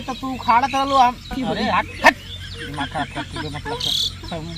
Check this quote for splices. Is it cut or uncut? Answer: uncut